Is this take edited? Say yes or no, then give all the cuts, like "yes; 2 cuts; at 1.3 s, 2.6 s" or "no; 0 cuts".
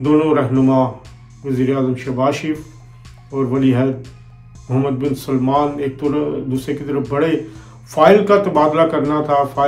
no; 0 cuts